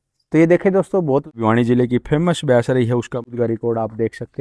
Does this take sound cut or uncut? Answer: cut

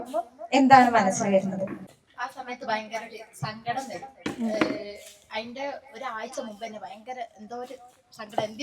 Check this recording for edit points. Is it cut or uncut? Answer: cut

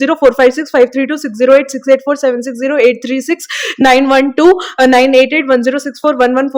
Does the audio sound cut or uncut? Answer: uncut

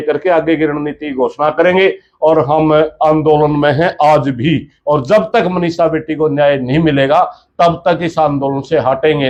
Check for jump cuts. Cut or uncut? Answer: uncut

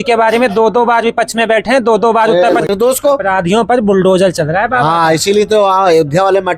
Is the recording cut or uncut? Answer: cut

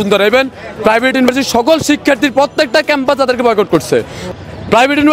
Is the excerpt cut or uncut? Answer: uncut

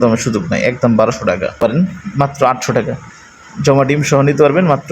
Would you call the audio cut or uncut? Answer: cut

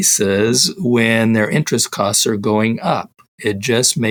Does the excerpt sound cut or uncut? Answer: uncut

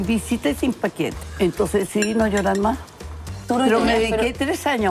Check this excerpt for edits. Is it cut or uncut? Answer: cut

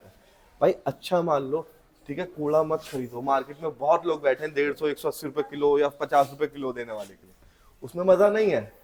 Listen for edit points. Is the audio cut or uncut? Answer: uncut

